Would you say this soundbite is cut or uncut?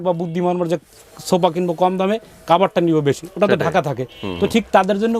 uncut